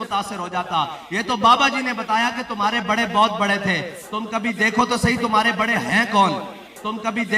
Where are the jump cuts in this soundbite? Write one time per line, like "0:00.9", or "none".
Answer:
0:00.9